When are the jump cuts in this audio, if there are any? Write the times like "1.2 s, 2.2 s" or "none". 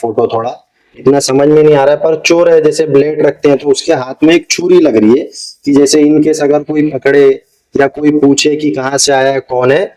none